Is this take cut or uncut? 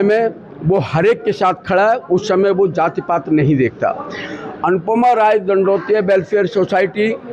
uncut